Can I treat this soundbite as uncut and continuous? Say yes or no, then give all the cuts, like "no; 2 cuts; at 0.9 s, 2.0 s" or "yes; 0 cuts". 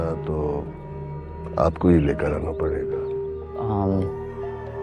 yes; 0 cuts